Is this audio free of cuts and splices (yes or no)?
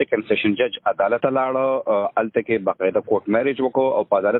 no